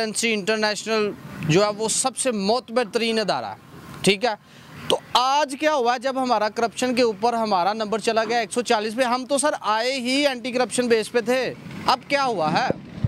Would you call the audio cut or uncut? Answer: uncut